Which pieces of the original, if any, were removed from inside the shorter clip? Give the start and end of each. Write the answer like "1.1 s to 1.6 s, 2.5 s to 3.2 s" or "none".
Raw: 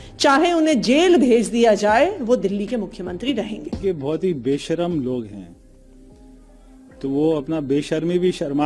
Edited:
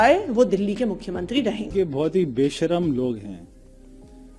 3.6 s to 3.8 s